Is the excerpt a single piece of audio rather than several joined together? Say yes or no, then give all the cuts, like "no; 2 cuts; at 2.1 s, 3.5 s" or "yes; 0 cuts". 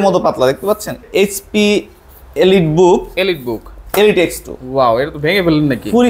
no; 1 cut; at 1.0 s